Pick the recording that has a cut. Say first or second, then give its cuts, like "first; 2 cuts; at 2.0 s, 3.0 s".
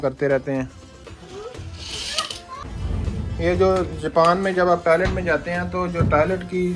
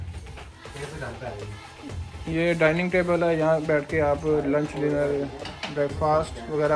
first; 1 cut; at 2.6 s